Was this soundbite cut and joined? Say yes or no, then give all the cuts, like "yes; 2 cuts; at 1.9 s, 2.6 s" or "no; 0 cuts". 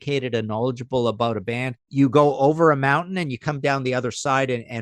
yes; 1 cut; at 1.9 s